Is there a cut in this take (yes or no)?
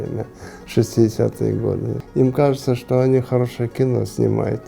yes